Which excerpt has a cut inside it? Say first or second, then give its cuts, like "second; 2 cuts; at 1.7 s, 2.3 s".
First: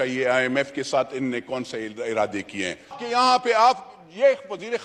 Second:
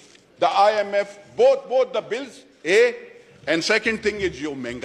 first; 1 cut; at 3.0 s